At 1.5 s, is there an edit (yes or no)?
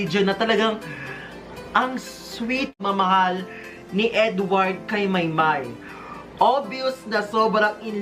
no